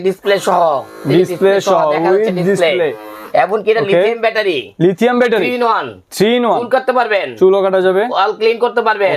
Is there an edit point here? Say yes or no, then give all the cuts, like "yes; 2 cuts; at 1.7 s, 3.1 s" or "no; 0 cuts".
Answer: no; 0 cuts